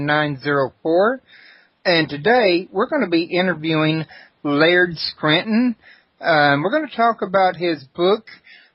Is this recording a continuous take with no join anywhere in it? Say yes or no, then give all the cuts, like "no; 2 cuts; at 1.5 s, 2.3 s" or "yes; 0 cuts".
no; 1 cut; at 3.6 s